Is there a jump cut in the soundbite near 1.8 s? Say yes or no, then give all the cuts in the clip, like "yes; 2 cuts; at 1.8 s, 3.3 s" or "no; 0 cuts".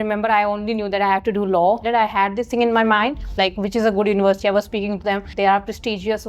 yes; 3 cuts; at 1.8 s, 3.3 s, 5.3 s